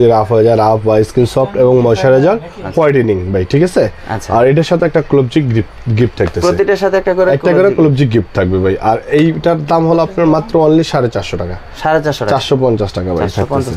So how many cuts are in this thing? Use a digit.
0